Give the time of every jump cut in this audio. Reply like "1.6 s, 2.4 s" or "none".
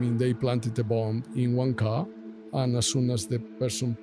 2.5 s

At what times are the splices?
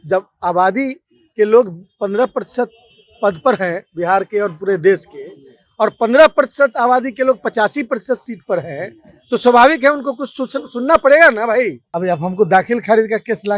11.8 s

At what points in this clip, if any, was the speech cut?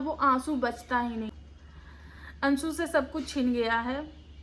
1.3 s

